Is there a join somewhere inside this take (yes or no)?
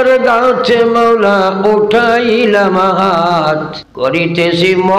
yes